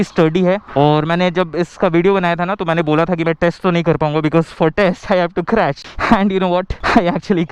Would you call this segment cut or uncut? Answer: uncut